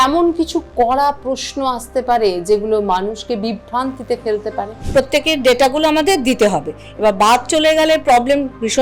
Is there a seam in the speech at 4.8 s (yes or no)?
yes